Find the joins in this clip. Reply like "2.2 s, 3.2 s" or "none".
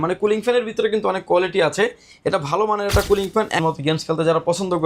3.6 s